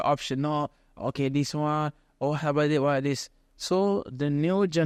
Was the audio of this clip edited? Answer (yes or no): no